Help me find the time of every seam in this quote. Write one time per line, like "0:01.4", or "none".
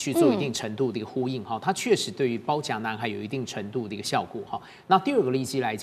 none

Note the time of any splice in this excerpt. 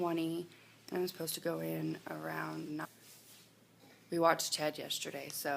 none

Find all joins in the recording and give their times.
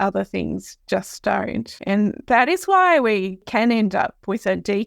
0:01.7
0:03.4

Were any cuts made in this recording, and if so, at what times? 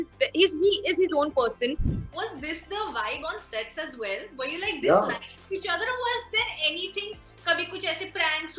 0:01.9

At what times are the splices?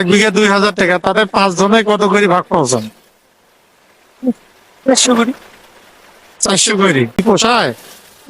0:07.2

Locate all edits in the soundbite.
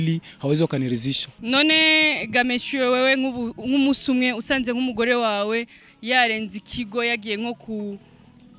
0:01.3

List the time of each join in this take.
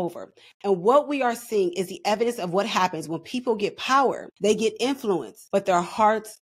0:04.3
0:05.3

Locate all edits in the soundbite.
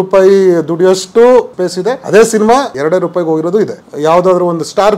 0:01.6
0:02.7
0:03.8

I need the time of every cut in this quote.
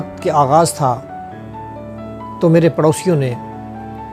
0:01.0
0:02.4

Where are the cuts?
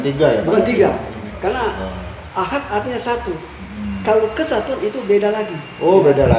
none

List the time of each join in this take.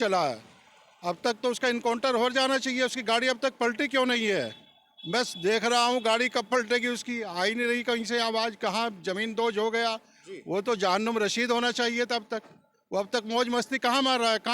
none

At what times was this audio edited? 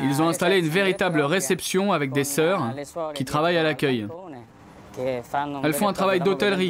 none

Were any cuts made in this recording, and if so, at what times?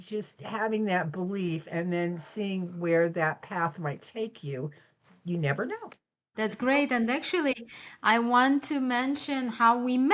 0:06.3

